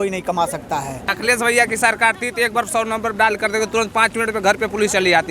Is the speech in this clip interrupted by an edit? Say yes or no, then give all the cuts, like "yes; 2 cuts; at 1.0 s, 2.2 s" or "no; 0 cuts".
yes; 1 cut; at 1.1 s